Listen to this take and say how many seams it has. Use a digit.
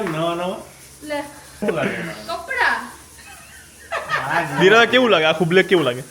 1